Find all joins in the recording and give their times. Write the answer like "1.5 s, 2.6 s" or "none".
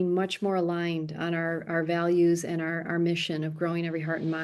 none